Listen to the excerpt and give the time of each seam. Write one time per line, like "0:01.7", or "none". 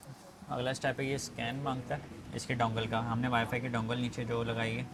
none